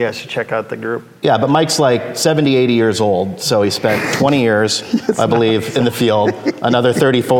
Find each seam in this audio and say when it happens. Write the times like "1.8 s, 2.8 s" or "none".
none